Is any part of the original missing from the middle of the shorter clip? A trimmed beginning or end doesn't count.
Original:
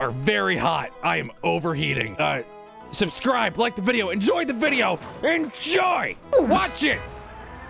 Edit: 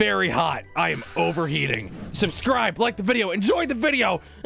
yes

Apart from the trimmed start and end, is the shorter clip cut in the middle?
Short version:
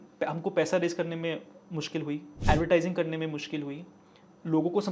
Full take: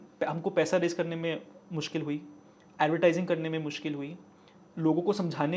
yes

